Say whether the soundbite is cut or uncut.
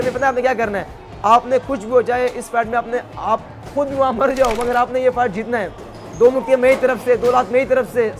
uncut